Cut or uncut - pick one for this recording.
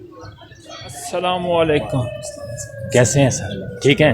cut